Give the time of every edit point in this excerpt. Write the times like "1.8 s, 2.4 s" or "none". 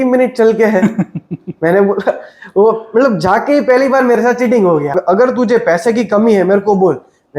4.9 s

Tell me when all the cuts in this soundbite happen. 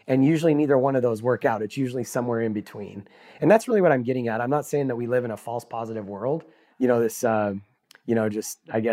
none

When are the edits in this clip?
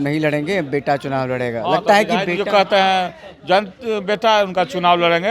none

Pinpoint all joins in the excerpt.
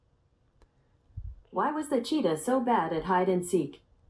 none

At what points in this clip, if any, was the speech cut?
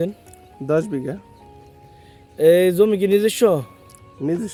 none

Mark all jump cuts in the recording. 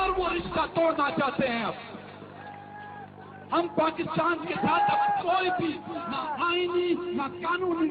none

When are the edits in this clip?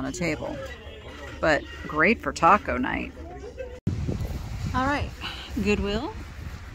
3.8 s

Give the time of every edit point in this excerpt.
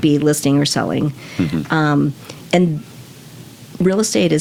none

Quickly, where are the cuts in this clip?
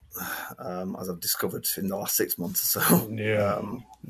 none

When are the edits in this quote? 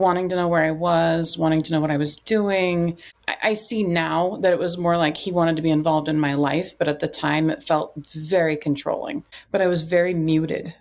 9.3 s

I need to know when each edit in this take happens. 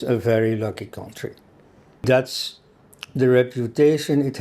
1.9 s

